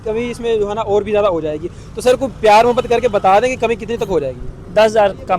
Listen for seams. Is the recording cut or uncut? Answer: uncut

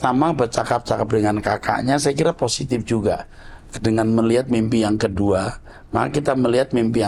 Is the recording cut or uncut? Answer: uncut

